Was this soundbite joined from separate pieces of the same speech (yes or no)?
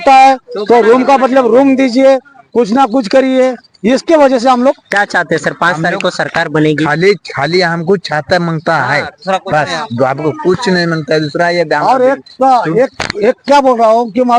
no